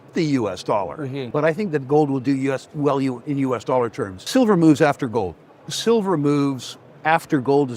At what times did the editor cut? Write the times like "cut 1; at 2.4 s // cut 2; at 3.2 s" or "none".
cut 1; at 1.2 s // cut 2; at 4.2 s